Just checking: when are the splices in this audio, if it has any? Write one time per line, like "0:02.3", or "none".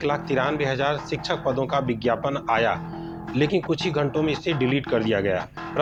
none